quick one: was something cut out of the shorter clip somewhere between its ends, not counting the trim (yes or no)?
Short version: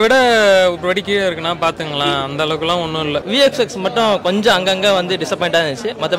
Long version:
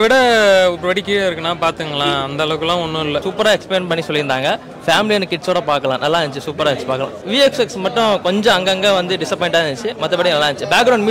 yes